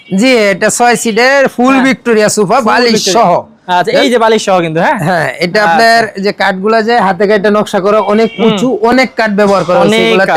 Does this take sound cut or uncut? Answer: uncut